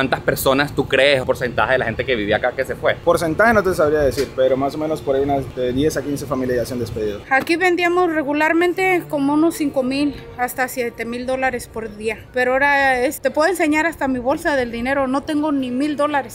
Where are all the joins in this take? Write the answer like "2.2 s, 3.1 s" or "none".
1.2 s, 3.0 s, 5.5 s, 7.2 s, 12.2 s, 13.2 s